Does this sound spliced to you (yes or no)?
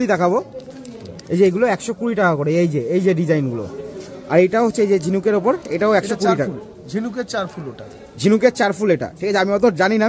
no